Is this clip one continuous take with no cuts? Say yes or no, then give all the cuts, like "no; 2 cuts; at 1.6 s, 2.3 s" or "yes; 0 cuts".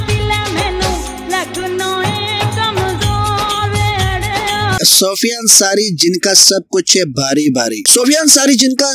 no; 2 cuts; at 4.8 s, 7.8 s